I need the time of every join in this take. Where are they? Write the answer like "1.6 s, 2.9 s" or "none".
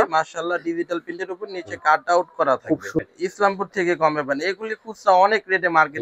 3.0 s